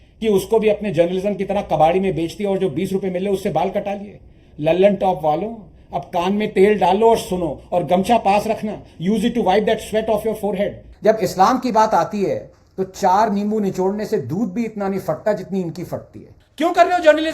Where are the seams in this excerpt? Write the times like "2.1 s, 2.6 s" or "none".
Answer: 10.9 s, 16.1 s